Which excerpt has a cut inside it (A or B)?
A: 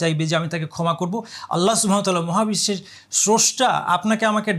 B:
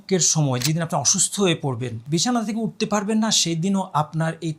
B